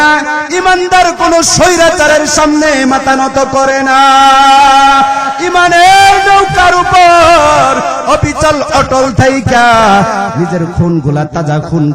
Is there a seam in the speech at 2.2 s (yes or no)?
no